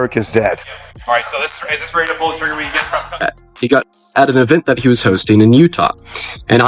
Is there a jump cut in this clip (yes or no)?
yes